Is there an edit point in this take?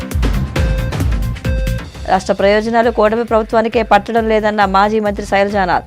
yes; 1 cut; at 1.0 s

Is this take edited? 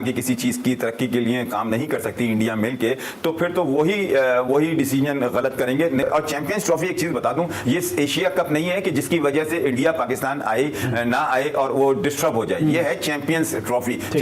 no; 0 cuts

